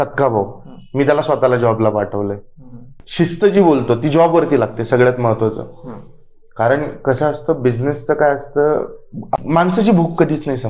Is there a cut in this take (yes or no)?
yes